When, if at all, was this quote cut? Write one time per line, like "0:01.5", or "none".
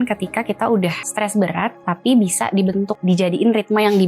0:01.0
0:03.0